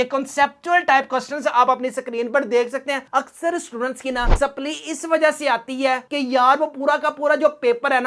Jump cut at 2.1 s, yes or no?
no